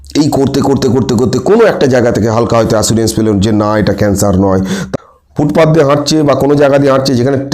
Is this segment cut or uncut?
cut